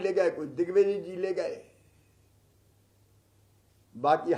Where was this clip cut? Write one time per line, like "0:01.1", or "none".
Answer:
none